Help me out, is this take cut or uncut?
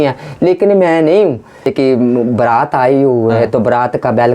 cut